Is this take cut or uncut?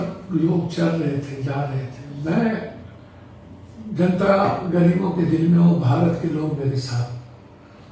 uncut